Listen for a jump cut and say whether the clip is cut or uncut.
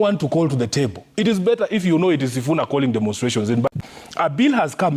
cut